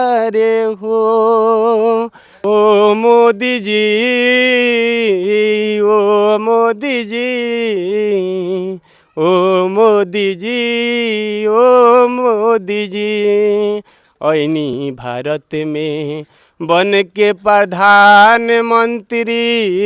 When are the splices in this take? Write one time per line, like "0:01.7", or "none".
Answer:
0:02.3